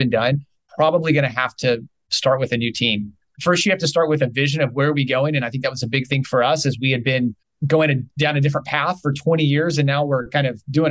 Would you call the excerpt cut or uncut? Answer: uncut